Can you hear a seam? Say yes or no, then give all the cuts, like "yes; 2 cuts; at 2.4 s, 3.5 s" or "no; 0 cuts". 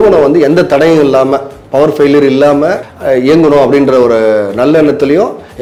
no; 0 cuts